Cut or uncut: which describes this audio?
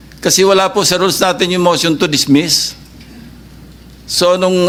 uncut